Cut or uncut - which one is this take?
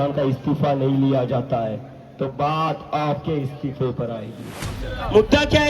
cut